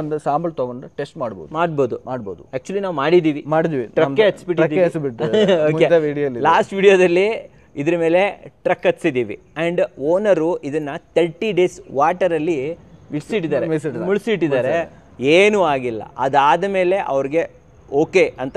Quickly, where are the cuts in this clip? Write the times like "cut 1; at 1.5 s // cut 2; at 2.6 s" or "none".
none